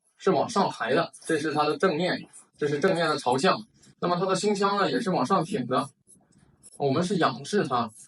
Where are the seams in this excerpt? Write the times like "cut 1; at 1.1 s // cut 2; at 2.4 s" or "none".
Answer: cut 1; at 1.2 s